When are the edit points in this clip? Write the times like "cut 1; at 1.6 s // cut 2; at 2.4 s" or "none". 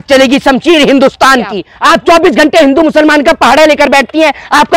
cut 1; at 1.7 s